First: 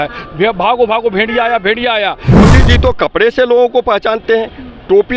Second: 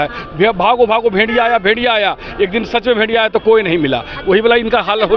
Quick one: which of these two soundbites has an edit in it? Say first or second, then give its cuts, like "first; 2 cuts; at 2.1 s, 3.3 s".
first; 1 cut; at 2.4 s